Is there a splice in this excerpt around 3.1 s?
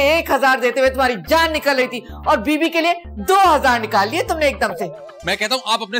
no; 1 cut; at 5.1 s

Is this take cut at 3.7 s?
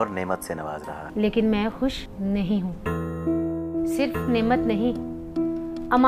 yes; 2 cuts; at 1.0 s, 3.7 s

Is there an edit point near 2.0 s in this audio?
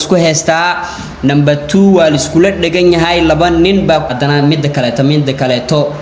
no; 1 cut; at 4.0 s

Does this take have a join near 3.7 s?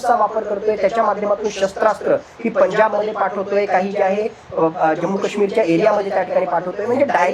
no; 0 cuts

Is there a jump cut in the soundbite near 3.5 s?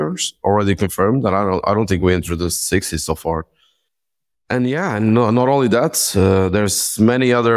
no; 0 cuts

